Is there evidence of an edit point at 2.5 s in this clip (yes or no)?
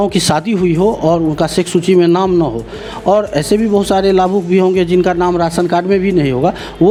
no